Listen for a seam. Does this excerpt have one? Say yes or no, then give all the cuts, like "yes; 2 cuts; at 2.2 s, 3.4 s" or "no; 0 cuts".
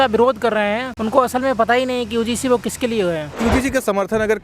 yes; 2 cuts; at 0.9 s, 3.3 s